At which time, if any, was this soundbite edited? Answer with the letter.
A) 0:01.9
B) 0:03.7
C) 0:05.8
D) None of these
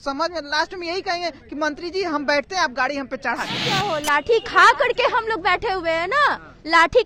B